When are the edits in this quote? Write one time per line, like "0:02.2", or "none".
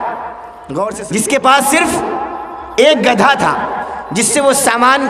0:01.0